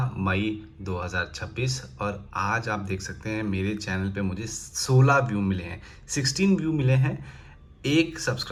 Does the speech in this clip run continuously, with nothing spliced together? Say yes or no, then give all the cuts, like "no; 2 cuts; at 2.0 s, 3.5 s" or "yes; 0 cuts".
yes; 0 cuts